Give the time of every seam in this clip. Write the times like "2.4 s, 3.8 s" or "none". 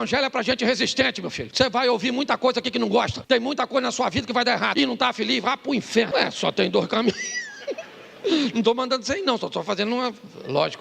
1.4 s, 3.2 s, 4.7 s, 6.1 s